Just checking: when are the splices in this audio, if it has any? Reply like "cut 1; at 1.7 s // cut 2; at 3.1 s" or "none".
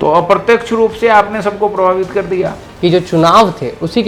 cut 1; at 2.6 s